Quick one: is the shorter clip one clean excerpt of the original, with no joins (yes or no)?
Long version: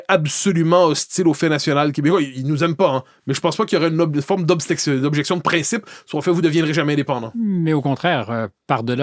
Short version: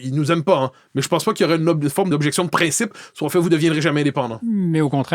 no